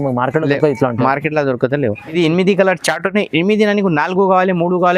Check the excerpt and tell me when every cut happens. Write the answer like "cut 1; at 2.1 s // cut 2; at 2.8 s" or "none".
cut 1; at 2.0 s